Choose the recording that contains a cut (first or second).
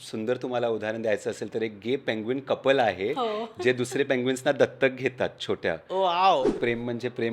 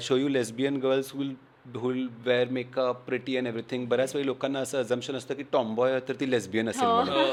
first